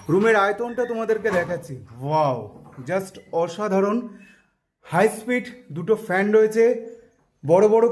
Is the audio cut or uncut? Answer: uncut